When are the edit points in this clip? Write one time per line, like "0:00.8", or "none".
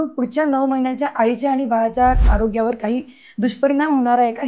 0:02.3